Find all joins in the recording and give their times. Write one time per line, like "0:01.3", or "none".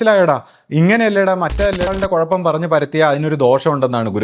0:01.9